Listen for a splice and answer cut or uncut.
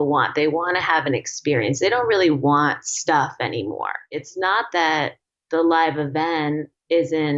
cut